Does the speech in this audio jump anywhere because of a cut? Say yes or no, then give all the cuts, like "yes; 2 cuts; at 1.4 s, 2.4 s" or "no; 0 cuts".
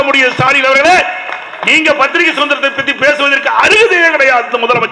no; 0 cuts